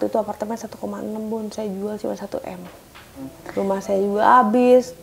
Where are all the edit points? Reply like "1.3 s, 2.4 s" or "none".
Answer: 3.4 s